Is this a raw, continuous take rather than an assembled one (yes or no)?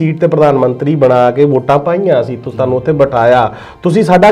yes